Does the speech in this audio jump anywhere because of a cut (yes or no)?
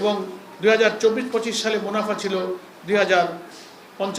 no